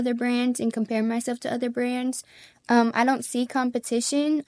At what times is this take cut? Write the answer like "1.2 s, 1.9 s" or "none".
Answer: none